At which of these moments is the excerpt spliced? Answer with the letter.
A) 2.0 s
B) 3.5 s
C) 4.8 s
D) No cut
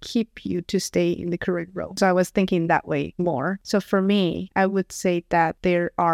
A